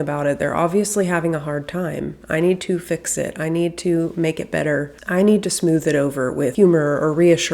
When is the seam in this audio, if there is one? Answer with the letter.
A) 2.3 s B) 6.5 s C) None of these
B